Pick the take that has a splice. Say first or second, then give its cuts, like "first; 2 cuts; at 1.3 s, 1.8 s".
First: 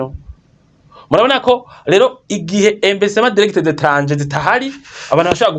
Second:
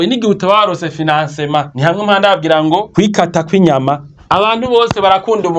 second; 3 cuts; at 1.7 s, 2.9 s, 4.1 s